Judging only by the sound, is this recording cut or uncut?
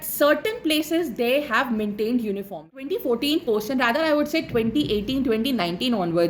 cut